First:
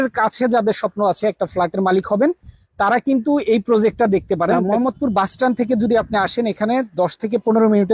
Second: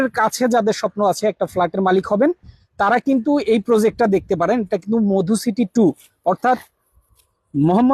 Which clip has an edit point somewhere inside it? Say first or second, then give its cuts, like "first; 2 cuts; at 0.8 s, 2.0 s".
first; 1 cut; at 4.6 s